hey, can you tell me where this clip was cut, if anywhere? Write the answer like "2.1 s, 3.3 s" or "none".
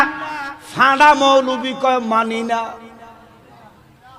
none